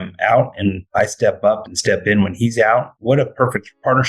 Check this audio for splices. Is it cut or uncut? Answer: cut